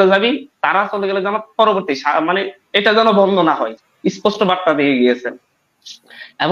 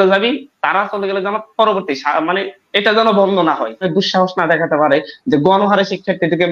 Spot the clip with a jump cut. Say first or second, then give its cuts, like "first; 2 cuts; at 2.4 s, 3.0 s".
second; 1 cut; at 3.9 s